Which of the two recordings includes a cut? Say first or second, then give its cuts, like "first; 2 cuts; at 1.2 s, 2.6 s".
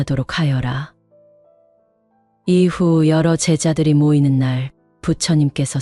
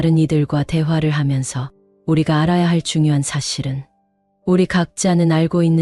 first; 2 cuts; at 1.0 s, 2.3 s